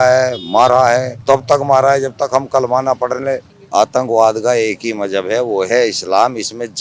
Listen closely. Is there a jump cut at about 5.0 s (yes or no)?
no